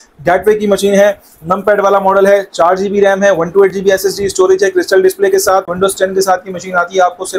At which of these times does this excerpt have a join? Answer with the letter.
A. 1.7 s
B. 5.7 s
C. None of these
B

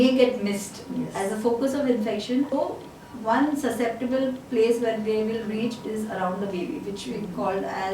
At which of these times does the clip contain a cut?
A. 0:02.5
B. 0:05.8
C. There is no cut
A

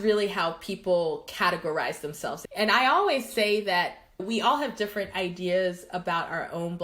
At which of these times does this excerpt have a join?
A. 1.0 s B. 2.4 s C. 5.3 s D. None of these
B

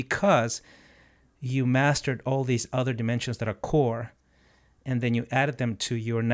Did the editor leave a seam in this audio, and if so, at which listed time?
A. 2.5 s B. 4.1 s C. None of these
C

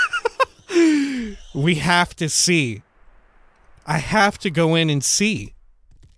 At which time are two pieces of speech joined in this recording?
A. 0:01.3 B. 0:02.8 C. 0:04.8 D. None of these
D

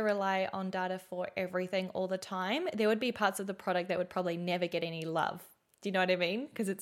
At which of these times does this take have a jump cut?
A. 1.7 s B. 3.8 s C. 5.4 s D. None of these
D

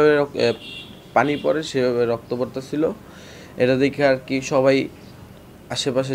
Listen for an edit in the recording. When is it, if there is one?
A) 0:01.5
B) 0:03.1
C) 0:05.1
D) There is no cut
D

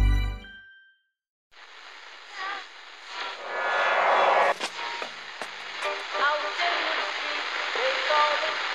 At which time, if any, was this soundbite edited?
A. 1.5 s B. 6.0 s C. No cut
A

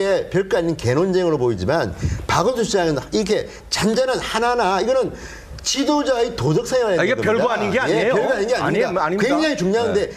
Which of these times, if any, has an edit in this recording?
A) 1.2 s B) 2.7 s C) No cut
B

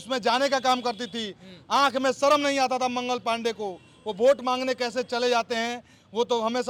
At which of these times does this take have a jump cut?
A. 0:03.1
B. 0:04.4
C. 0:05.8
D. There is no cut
D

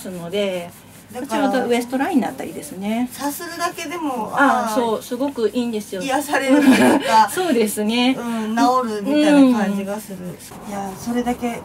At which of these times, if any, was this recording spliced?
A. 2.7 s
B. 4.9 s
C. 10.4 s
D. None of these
C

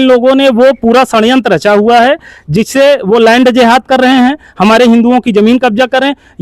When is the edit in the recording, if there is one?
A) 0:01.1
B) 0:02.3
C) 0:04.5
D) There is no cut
D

